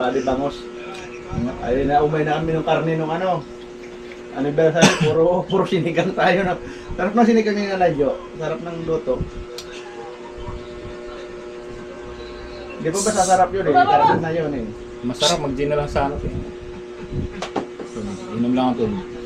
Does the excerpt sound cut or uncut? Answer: uncut